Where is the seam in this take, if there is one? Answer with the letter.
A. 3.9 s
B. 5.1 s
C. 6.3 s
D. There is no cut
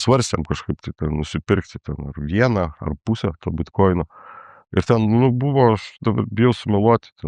D